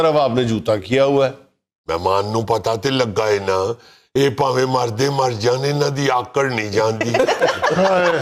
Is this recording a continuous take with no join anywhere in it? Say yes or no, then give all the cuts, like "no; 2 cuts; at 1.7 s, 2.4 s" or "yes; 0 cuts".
yes; 0 cuts